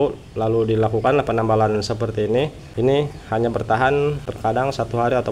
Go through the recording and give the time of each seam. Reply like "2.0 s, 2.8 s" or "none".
2.6 s, 4.3 s

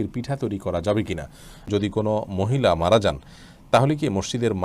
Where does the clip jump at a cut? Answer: 1.7 s

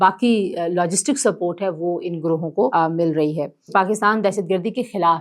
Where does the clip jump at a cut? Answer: 2.7 s, 3.7 s

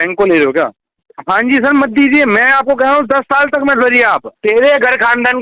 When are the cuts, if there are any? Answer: 1.0 s, 4.2 s

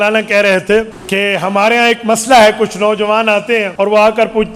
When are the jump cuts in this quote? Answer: 1.0 s, 3.7 s

